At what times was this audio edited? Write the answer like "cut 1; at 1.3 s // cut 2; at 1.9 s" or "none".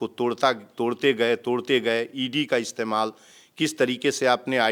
none